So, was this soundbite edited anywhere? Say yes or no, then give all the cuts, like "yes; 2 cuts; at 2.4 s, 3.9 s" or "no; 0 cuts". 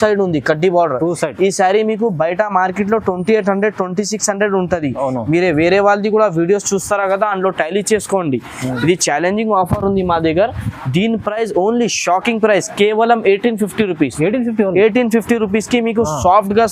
no; 0 cuts